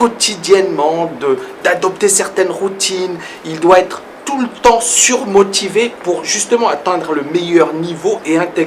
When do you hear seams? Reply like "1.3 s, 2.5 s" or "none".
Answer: 6.3 s

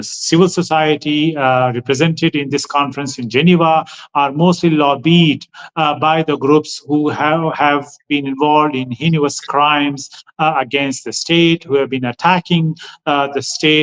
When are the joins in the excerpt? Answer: none

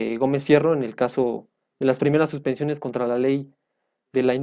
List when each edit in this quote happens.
none

